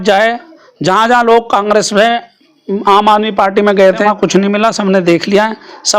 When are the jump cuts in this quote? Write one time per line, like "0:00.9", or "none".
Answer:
0:04.0